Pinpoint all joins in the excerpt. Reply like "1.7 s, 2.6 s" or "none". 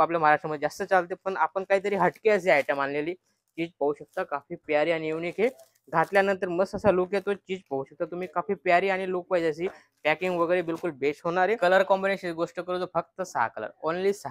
11.6 s